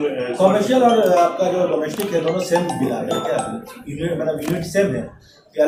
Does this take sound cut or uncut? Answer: uncut